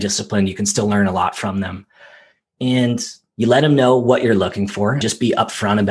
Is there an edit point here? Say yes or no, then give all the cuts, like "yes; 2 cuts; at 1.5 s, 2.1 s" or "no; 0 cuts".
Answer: yes; 1 cut; at 5.0 s